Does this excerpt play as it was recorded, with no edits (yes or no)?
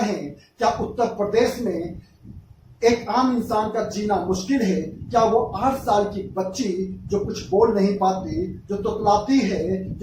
yes